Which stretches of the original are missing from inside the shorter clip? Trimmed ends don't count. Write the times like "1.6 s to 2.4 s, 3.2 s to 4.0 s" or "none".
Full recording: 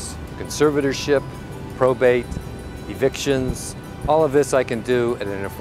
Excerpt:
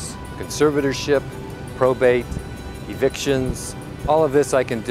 none